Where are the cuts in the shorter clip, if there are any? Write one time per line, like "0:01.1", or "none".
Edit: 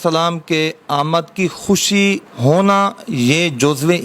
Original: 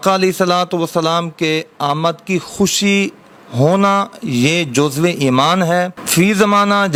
0:02.3